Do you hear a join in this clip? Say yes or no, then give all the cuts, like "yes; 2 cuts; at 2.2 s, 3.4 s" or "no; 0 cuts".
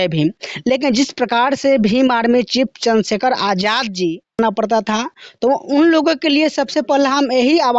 yes; 1 cut; at 4.4 s